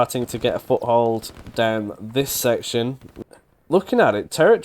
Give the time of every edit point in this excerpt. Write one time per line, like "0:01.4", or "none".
0:03.1